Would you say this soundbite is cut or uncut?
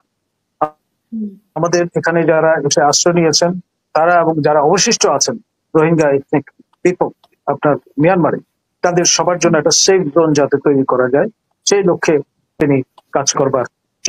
uncut